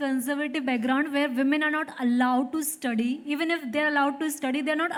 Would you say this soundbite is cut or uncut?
uncut